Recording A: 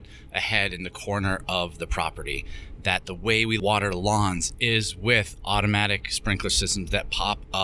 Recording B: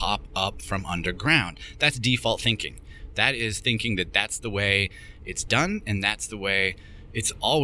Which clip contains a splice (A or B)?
A